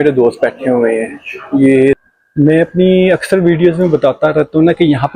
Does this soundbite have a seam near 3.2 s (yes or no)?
no